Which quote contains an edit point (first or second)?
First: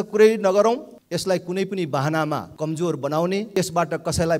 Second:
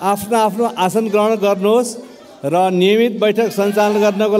first